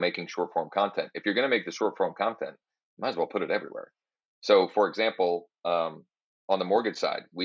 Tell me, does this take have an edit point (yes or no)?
no